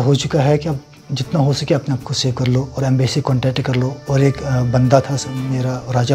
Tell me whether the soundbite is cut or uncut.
uncut